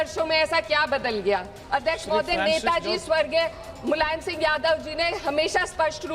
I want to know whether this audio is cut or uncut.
cut